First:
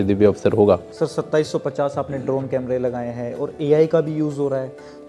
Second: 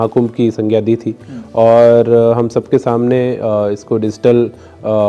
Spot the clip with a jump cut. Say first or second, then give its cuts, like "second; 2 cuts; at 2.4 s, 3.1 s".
first; 1 cut; at 0.9 s